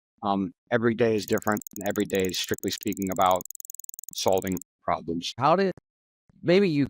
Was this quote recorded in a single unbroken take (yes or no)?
no